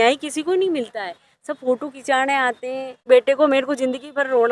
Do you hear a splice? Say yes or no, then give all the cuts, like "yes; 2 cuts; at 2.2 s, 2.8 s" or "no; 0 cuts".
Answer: yes; 1 cut; at 3.0 s